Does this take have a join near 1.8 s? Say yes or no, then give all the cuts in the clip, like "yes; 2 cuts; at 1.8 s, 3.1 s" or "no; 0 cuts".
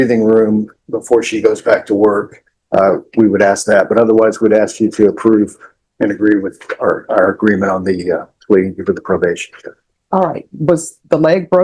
yes; 1 cut; at 1.8 s